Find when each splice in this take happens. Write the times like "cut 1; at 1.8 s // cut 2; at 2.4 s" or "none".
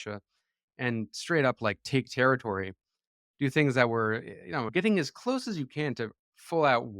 cut 1; at 4.7 s